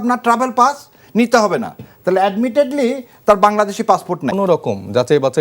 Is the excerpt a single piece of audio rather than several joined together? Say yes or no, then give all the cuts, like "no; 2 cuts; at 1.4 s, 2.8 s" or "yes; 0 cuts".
no; 1 cut; at 4.3 s